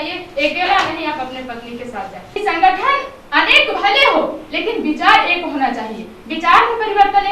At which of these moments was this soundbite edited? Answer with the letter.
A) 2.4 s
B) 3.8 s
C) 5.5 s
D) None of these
A